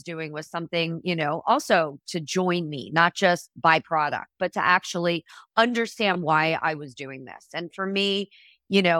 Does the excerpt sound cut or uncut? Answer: uncut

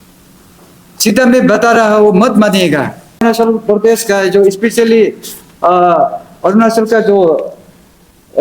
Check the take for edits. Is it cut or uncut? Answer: cut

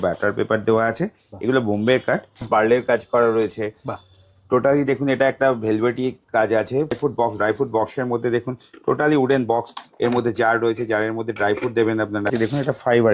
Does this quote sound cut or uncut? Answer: cut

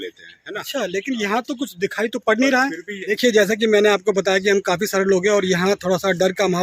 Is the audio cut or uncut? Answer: cut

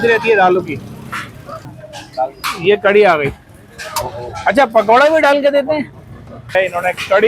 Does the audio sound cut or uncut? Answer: cut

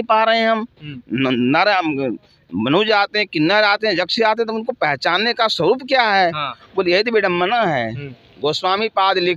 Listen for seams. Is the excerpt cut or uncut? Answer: uncut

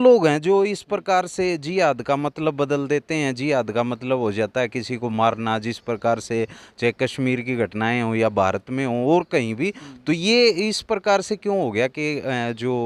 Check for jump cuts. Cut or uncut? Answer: uncut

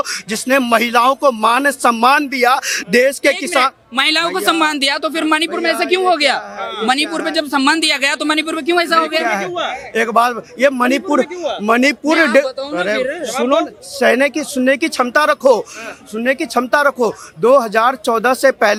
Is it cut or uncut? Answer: uncut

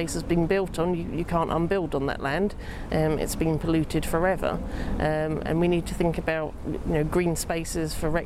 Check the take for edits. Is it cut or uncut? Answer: uncut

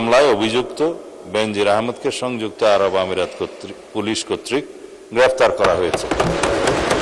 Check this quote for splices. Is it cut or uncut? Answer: uncut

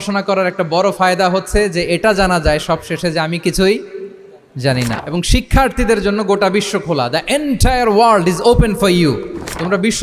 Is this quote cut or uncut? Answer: cut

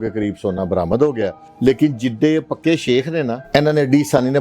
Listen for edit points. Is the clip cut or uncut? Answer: cut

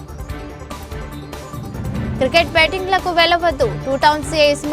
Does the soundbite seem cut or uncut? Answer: cut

